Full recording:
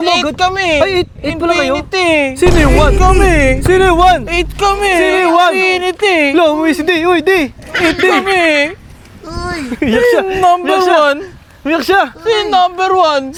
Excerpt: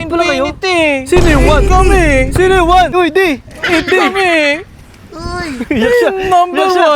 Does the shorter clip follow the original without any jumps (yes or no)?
no